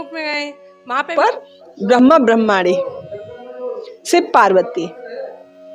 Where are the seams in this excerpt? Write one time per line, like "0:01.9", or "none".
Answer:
0:01.1